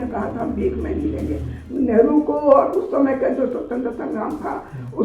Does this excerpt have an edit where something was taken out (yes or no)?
yes